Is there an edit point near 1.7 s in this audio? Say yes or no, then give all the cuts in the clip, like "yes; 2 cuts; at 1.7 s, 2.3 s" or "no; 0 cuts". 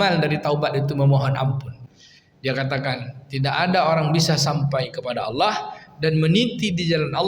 yes; 1 cut; at 1.7 s